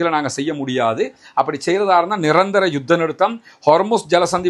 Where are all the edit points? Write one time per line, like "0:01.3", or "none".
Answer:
none

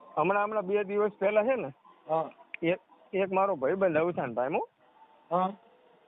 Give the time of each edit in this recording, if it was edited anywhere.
none

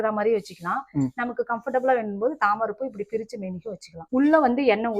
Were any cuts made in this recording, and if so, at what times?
0:04.0

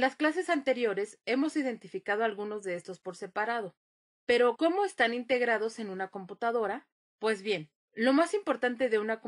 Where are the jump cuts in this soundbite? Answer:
none

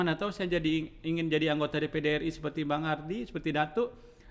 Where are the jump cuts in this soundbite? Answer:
none

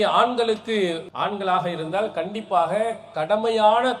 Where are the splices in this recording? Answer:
0:01.1

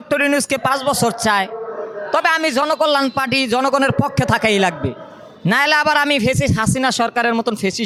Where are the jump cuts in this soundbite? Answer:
none

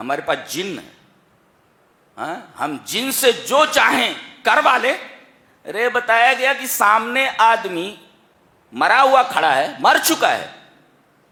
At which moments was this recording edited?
none

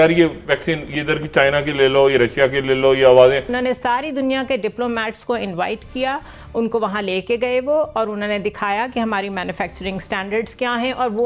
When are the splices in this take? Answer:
0:03.5

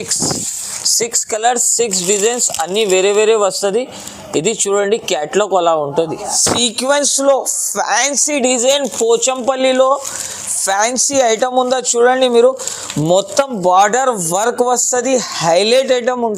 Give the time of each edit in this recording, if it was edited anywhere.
0:06.3

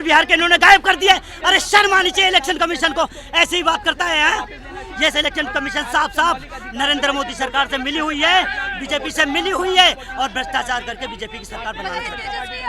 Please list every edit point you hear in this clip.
none

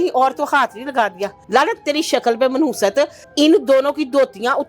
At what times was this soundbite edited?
0:01.3
0:03.2

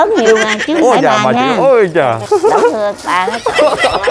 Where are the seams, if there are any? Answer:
0:02.2

